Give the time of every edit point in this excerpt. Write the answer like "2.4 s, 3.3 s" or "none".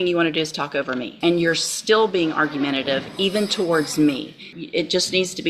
1.1 s, 4.5 s